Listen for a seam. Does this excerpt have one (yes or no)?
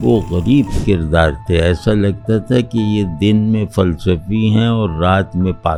no